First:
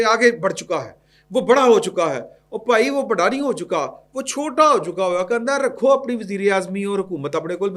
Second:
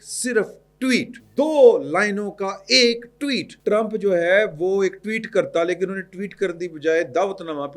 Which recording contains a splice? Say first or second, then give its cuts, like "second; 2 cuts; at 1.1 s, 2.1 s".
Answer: second; 2 cuts; at 1.2 s, 3.5 s